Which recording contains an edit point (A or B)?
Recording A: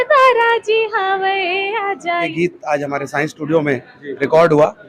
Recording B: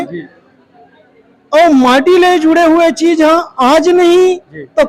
A